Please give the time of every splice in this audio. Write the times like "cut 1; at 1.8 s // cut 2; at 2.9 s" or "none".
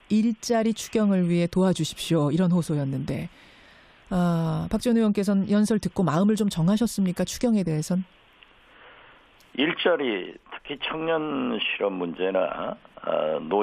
cut 1; at 2.4 s

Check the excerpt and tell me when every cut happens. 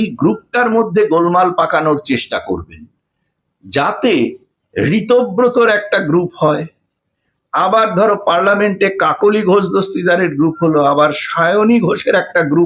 none

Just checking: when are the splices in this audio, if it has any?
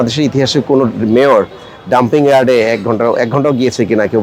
none

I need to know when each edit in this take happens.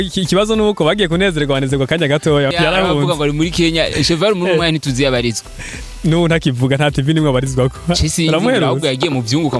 cut 1; at 2.5 s

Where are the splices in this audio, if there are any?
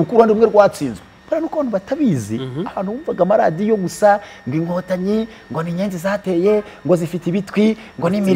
cut 1; at 1.1 s

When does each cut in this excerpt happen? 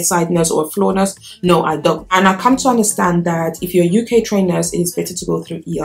cut 1; at 2.1 s

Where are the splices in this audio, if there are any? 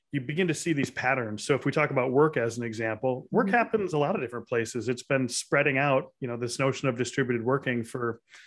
none

